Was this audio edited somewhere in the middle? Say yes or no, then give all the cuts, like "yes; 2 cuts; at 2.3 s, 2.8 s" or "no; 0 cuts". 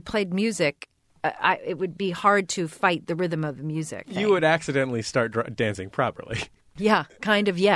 yes; 3 cuts; at 1.0 s, 4.1 s, 6.7 s